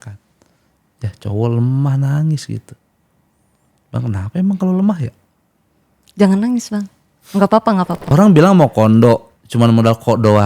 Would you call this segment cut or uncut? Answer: cut